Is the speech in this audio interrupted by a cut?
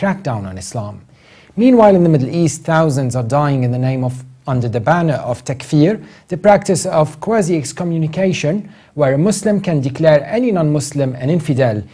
yes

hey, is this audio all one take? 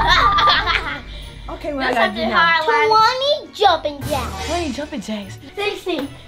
no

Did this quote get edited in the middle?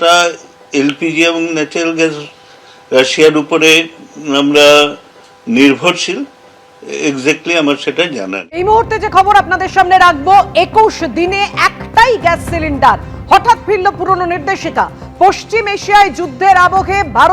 yes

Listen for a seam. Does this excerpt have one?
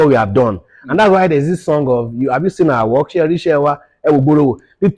no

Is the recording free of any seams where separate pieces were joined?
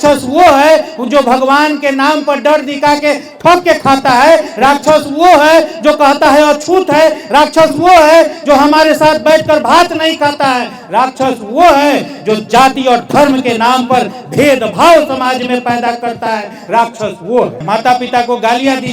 no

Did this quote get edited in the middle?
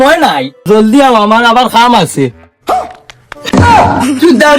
no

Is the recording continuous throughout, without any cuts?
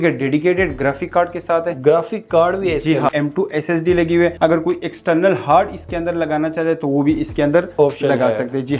no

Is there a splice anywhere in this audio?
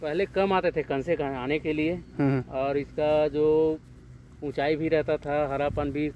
no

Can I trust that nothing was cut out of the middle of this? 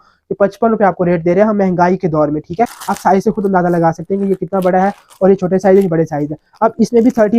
no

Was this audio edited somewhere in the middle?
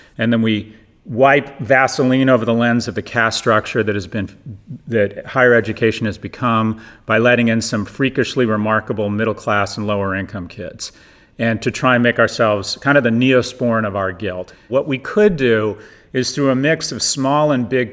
yes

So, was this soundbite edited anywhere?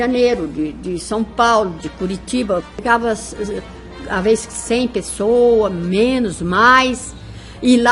yes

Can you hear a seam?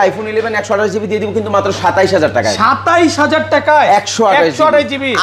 no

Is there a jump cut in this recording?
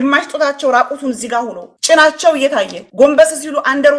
yes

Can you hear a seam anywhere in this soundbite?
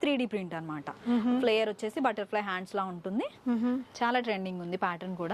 no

